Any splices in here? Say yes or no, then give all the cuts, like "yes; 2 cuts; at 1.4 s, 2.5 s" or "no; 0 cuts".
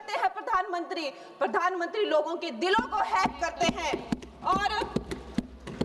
no; 0 cuts